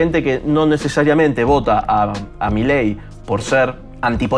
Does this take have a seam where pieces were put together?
no; 0 cuts

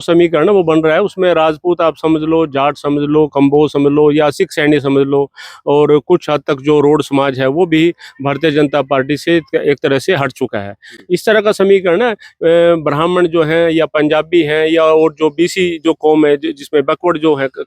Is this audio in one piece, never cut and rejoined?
yes; 0 cuts

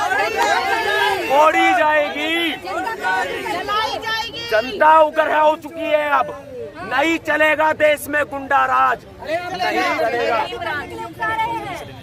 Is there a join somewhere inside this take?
no; 0 cuts

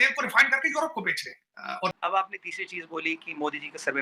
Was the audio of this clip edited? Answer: yes; 1 cut; at 2.0 s

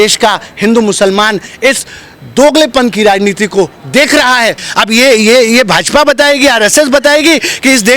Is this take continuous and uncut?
no; 1 cut; at 4.6 s

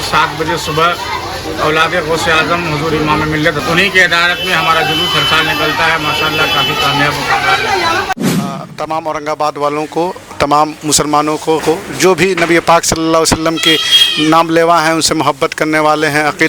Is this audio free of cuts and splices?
no; 3 cuts; at 3.6 s, 8.1 s, 11.6 s

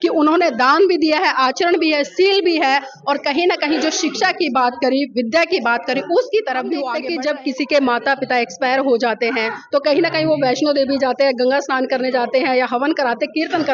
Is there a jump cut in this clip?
yes; 1 cut; at 7.0 s

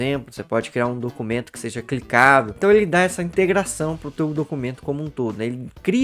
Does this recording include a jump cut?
yes; 1 cut; at 2.5 s

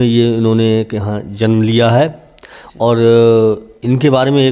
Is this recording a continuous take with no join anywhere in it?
yes; 0 cuts

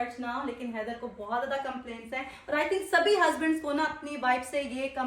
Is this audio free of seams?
yes; 0 cuts

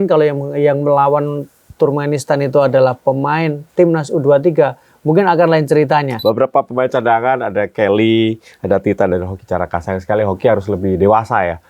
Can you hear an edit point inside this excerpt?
yes; 1 cut; at 6.1 s

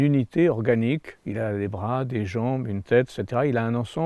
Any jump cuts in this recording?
no; 0 cuts

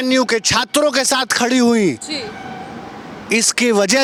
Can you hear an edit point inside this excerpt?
no; 0 cuts

